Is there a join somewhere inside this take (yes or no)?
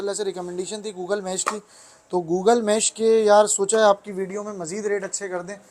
no